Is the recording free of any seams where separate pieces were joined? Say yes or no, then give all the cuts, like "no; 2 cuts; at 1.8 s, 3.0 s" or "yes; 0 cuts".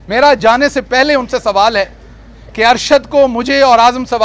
yes; 0 cuts